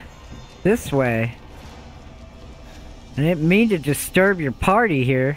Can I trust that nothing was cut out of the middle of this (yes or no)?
yes